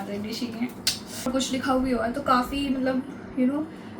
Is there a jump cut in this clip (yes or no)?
yes